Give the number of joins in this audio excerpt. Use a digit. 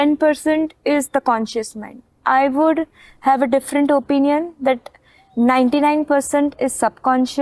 0